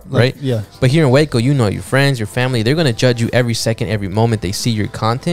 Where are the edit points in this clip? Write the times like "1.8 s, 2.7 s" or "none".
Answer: none